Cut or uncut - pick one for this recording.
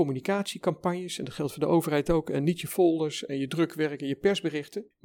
uncut